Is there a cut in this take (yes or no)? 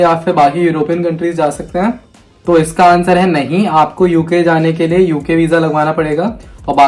no